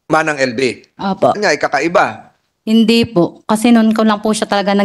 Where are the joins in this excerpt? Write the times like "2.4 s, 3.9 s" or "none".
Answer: 1.4 s